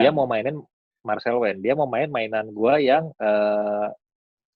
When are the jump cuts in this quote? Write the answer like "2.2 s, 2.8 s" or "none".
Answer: none